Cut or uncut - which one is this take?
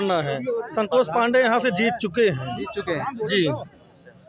uncut